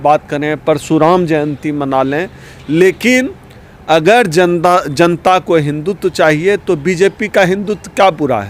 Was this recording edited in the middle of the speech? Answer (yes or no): no